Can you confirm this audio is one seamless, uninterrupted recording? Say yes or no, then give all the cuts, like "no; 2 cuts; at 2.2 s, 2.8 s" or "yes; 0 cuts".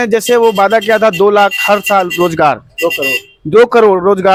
yes; 0 cuts